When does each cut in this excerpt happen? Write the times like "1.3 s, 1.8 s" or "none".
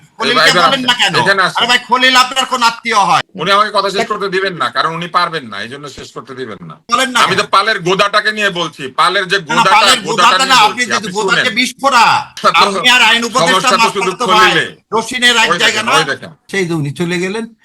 6.8 s, 12.4 s, 16.4 s